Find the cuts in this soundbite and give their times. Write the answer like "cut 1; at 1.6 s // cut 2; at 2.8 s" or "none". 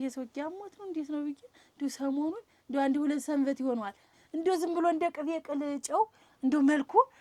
cut 1; at 4.1 s